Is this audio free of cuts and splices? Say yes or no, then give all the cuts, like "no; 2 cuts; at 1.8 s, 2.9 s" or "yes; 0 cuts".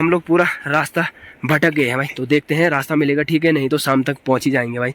yes; 0 cuts